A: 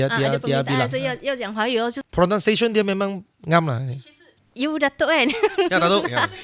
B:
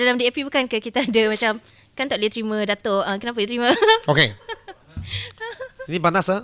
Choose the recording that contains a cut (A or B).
A